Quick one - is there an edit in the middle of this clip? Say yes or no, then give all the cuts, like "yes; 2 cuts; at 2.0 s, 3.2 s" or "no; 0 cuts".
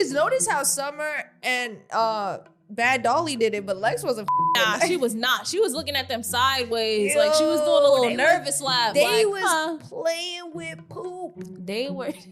no; 0 cuts